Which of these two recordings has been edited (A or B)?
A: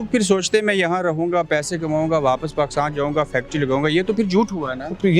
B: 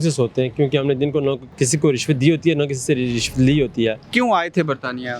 B